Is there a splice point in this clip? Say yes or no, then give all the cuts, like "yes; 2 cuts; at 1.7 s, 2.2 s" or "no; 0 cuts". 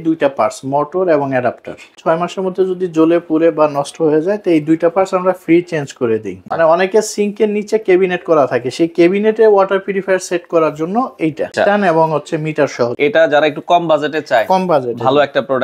yes; 4 cuts; at 1.9 s, 6.4 s, 11.5 s, 13.0 s